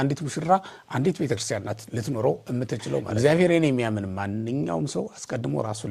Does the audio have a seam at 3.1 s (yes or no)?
yes